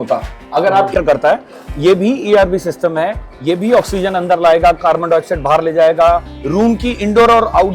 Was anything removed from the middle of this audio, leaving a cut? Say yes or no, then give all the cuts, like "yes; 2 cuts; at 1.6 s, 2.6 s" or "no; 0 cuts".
yes; 1 cut; at 0.9 s